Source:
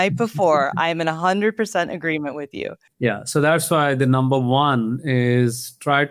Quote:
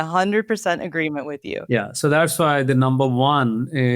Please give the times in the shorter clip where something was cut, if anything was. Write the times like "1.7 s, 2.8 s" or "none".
1.5 s

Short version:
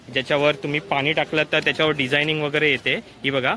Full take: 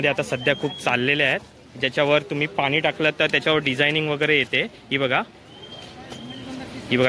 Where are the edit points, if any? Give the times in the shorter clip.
none

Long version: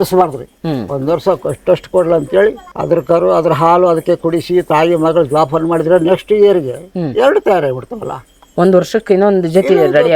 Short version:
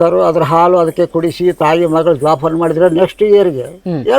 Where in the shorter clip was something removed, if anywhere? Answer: none

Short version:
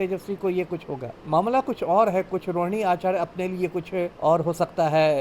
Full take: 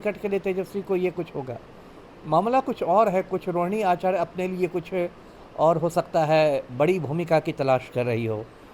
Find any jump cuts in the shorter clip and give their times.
1.1 s, 4.1 s

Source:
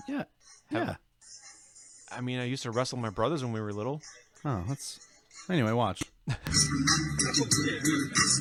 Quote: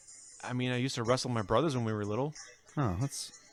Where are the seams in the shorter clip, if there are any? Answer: none

